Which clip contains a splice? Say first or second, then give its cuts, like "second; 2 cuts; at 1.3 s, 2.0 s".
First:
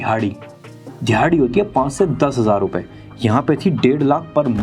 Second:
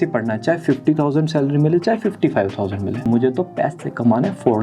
second; 1 cut; at 3.0 s